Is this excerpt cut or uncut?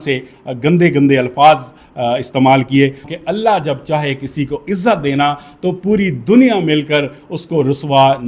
cut